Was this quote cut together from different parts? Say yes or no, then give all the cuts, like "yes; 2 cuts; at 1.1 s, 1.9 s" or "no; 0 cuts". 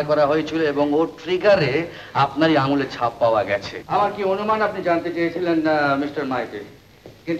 yes; 1 cut; at 3.8 s